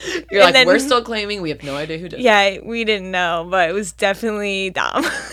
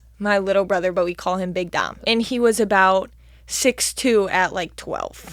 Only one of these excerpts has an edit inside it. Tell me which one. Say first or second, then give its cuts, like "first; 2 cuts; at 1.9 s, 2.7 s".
second; 1 cut; at 1.9 s